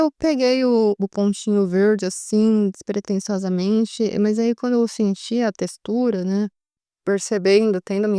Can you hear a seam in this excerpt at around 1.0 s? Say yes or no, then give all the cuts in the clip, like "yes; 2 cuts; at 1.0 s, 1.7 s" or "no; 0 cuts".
yes; 2 cuts; at 1.0 s, 6.9 s